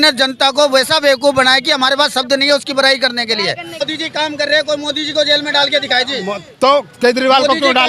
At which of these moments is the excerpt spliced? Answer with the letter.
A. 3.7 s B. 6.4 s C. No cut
A